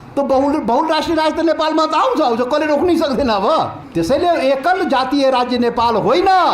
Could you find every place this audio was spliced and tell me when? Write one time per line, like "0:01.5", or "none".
0:03.8